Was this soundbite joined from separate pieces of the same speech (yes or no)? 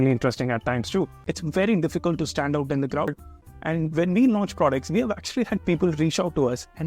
yes